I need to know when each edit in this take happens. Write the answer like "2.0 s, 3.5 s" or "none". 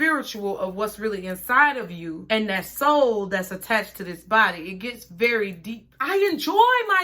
5.8 s

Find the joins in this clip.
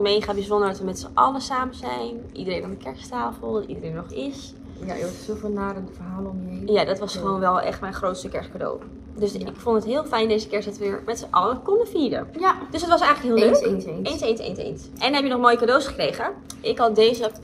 none

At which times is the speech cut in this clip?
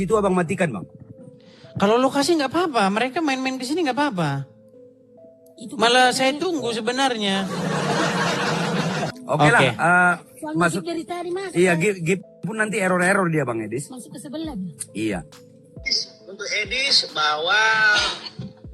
9.1 s, 15.9 s

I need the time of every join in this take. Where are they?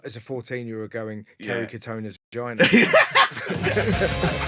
none

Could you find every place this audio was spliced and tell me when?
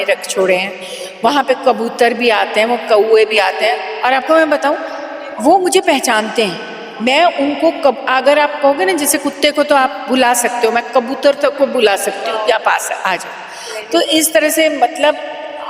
none

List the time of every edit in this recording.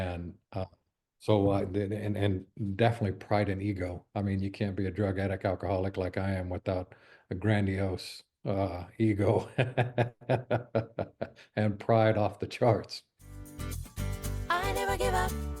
13.6 s

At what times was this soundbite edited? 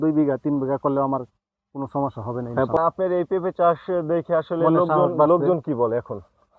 2.8 s

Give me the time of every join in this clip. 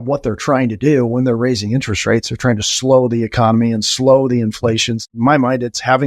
5.0 s

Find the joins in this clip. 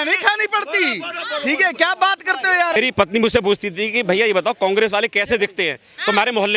2.8 s

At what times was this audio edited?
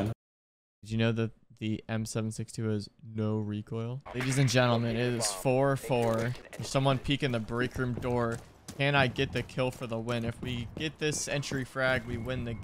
4.1 s

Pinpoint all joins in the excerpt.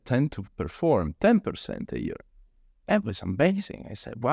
none

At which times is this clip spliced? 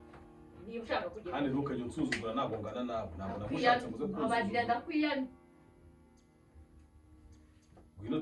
none

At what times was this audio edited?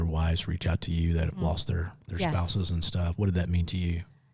none

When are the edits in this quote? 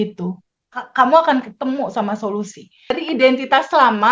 3.0 s

